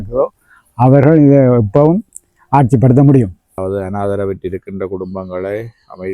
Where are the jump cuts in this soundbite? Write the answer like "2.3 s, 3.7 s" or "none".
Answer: 3.3 s